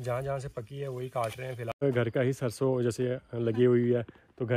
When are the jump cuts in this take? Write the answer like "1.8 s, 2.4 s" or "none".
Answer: 1.8 s

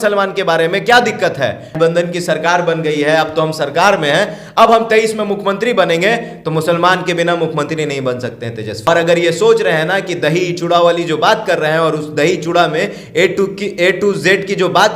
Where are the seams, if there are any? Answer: 1.7 s, 8.9 s

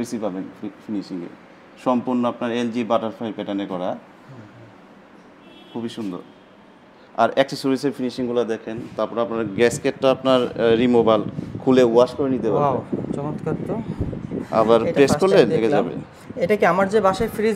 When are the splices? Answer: none

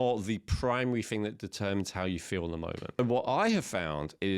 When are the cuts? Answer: 3.0 s

